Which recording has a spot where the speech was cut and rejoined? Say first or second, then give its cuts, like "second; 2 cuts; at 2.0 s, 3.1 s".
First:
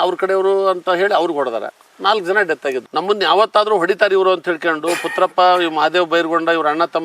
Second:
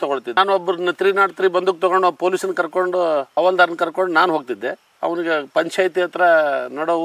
first; 1 cut; at 2.8 s